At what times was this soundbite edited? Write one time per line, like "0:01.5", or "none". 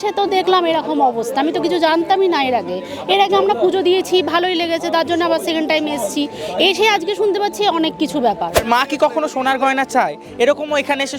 0:08.6